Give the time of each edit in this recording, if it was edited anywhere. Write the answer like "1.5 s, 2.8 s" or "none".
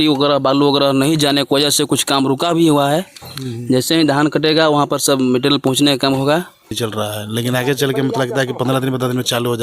6.7 s